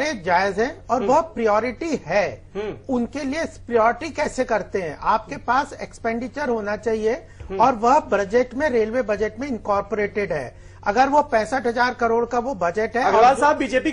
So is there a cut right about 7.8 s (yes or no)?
yes